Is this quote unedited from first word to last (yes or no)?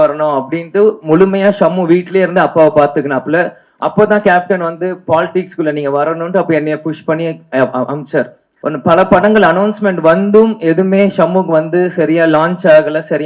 no